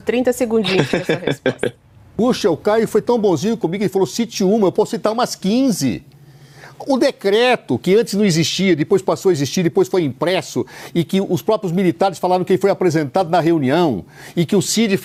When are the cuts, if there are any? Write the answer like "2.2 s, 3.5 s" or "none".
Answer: none